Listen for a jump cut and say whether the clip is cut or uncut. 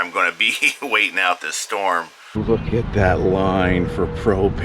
cut